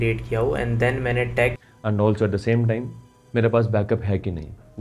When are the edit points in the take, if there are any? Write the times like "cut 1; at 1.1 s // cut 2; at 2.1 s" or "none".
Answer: cut 1; at 1.6 s